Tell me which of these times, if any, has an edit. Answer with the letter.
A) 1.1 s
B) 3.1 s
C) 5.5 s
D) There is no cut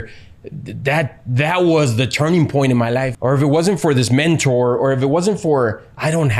B